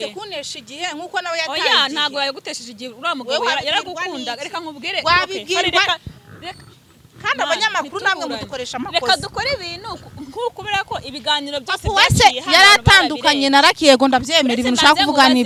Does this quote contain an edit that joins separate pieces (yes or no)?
no